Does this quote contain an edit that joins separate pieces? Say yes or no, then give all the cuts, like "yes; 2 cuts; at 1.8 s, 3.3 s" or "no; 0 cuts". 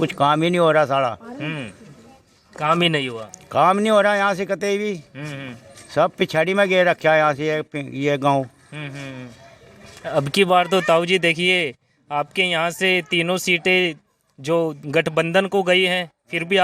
no; 0 cuts